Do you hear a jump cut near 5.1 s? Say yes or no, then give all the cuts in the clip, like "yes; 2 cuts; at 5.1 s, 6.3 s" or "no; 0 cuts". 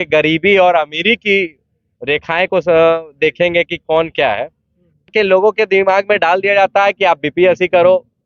yes; 1 cut; at 5.1 s